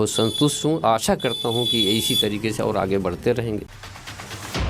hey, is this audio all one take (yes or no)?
no